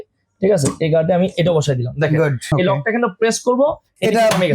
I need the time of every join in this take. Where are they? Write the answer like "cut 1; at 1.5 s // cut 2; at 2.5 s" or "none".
cut 1; at 2.4 s